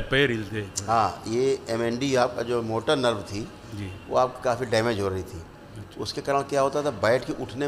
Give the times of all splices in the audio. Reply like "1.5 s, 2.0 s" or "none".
none